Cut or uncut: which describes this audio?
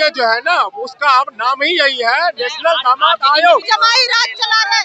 cut